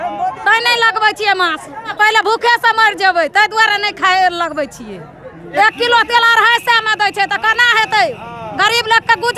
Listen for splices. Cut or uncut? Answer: cut